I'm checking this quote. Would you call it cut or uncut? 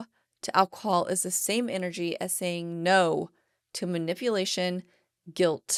uncut